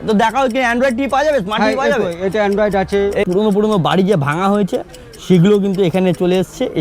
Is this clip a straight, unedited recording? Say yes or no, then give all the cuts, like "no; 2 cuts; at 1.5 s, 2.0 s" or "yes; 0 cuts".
no; 1 cut; at 3.3 s